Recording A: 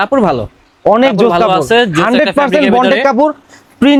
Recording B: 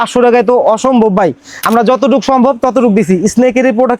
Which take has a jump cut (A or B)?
B